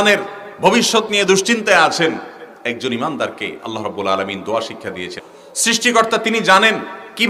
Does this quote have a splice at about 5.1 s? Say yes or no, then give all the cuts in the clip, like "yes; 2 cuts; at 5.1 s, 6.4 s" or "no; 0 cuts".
yes; 1 cut; at 5.1 s